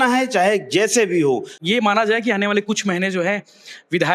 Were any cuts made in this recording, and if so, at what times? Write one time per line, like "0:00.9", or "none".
0:01.5